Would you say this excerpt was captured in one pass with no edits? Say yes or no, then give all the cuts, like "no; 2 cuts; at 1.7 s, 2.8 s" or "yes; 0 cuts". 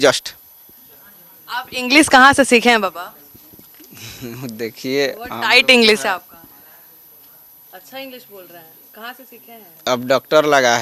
yes; 0 cuts